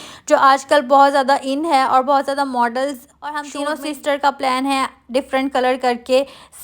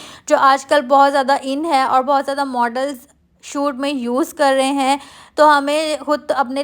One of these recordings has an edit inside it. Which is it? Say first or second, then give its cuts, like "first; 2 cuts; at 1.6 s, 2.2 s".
first; 1 cut; at 3.6 s